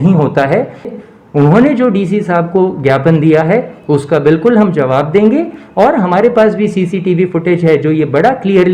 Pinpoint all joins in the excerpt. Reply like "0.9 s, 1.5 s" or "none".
0.9 s